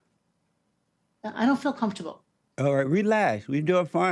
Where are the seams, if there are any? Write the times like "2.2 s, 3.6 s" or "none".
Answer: none